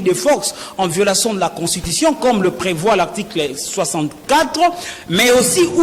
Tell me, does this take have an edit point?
no; 0 cuts

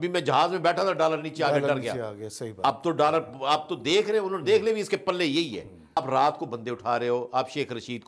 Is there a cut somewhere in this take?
yes; 1 cut; at 6.0 s

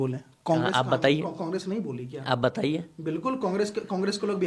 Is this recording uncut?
yes; 0 cuts

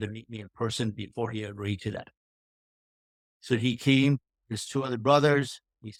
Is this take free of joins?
yes; 0 cuts

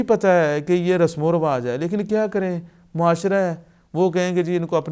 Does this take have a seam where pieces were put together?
no; 0 cuts

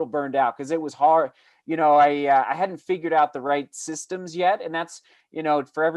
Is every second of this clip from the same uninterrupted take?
yes; 0 cuts

